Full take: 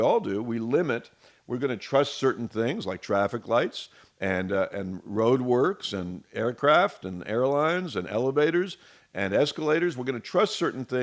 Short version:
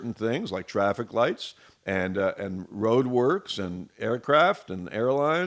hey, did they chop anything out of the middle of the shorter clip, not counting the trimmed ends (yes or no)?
no